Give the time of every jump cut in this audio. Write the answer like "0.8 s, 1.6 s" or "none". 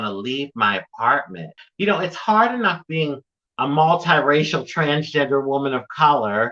1.5 s